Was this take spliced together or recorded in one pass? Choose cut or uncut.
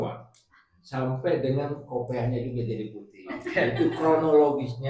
uncut